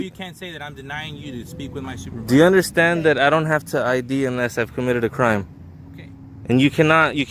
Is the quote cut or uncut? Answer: uncut